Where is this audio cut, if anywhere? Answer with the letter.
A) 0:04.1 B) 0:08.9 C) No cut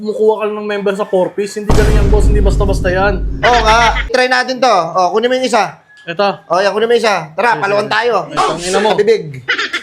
A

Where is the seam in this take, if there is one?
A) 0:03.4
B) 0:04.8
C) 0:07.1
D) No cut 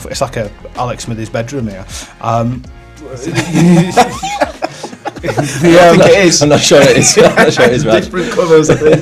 D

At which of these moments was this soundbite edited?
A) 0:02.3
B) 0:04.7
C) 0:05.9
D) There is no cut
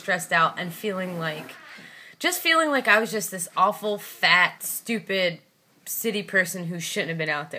B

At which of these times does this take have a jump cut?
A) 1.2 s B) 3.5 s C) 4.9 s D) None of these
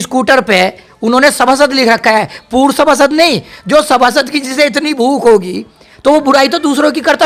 D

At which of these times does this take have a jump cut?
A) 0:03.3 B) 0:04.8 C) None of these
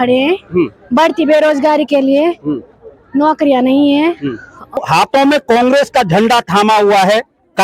B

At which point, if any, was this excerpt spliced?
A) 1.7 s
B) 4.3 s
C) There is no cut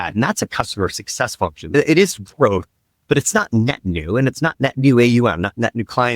A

